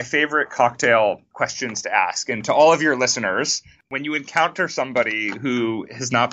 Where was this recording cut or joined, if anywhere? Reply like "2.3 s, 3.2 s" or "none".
1.3 s, 3.8 s